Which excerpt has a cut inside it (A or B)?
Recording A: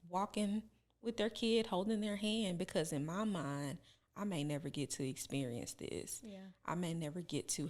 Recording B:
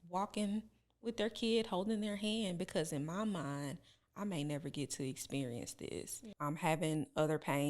B